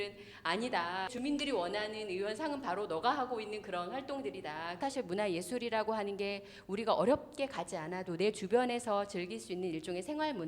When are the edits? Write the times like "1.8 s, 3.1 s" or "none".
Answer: 1.1 s, 4.8 s